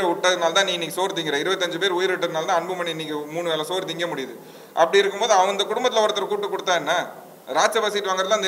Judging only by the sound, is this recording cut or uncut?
uncut